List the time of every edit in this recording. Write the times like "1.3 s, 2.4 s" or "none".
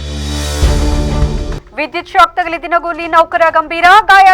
none